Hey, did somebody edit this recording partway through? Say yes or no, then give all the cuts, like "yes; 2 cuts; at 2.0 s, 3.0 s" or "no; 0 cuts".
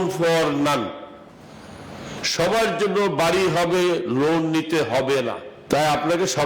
yes; 1 cut; at 5.5 s